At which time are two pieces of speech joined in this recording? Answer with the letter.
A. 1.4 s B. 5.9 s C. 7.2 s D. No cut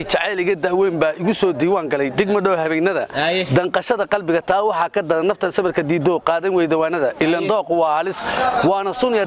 D